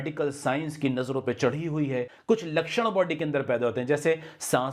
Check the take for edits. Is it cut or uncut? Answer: cut